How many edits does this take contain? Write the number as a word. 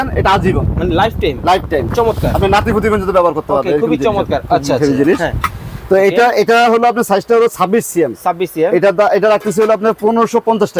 zero